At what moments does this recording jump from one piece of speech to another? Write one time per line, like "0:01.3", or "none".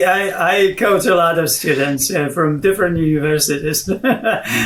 none